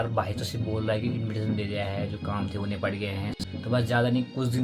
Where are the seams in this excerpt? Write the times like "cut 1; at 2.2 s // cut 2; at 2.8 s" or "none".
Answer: cut 1; at 3.4 s

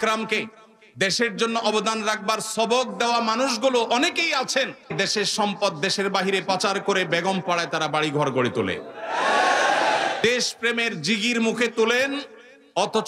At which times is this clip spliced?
cut 1; at 4.9 s // cut 2; at 10.2 s

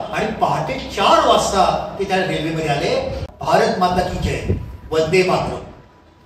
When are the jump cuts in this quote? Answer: cut 1; at 3.3 s

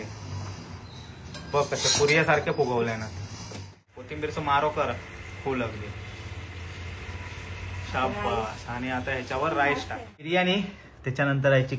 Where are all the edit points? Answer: cut 1; at 4.0 s // cut 2; at 10.3 s

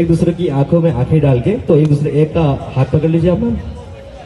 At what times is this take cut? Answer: cut 1; at 3.1 s

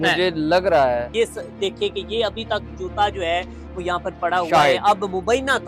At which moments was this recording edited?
cut 1; at 1.1 s

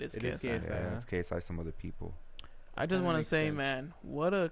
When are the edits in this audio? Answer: none

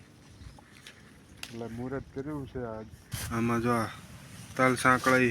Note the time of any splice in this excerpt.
cut 1; at 3.1 s

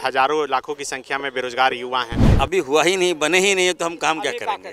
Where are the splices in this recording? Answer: cut 1; at 2.2 s

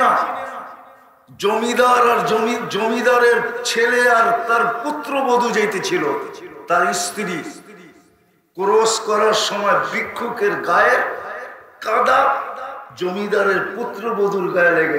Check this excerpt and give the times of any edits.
none

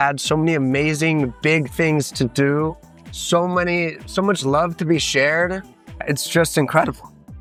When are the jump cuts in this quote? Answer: none

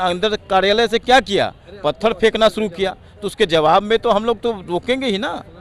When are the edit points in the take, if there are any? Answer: none

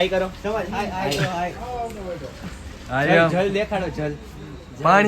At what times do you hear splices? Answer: cut 1; at 3.8 s

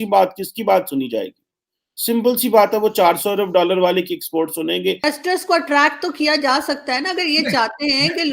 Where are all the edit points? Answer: cut 1; at 5.0 s

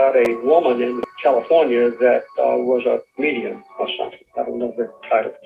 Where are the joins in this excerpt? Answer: none

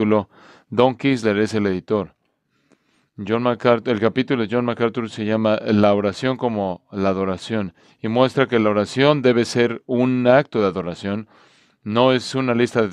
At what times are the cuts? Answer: cut 1; at 4.4 s

